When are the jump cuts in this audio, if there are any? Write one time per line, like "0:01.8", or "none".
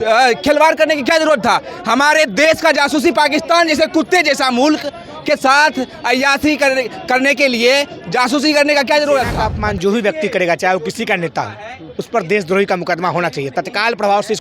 0:09.4